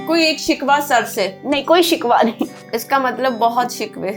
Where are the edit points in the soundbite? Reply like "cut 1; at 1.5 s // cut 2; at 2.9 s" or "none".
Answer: cut 1; at 2.7 s